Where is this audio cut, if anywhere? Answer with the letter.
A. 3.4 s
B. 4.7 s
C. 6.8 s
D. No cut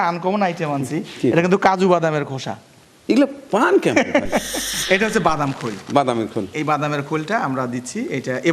B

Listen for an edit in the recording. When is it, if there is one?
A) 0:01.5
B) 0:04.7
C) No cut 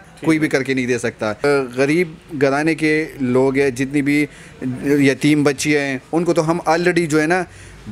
A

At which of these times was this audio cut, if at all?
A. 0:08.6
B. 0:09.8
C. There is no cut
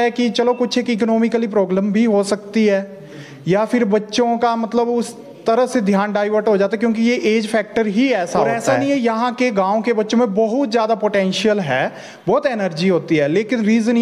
A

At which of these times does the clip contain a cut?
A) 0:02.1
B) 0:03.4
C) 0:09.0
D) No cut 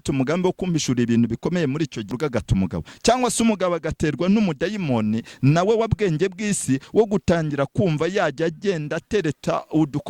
A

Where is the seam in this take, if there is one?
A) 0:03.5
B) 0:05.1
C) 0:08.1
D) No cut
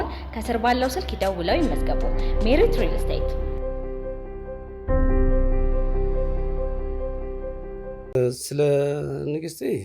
C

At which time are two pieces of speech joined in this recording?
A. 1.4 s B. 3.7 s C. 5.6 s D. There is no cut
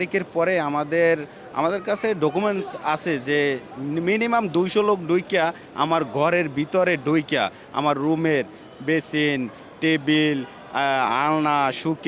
D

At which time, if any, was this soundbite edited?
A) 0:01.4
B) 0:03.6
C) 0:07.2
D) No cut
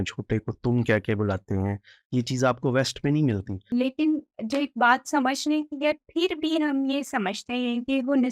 B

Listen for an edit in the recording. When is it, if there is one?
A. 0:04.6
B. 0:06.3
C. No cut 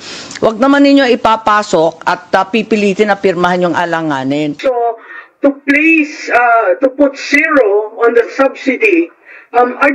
A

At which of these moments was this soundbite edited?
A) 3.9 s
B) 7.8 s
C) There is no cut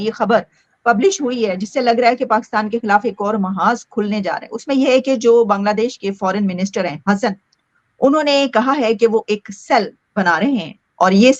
C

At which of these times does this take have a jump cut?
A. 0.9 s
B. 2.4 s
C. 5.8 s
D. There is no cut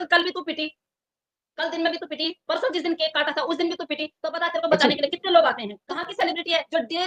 C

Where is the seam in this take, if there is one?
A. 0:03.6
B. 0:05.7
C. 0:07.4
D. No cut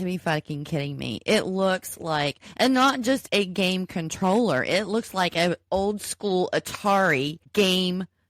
C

